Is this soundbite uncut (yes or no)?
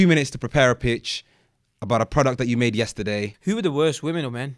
no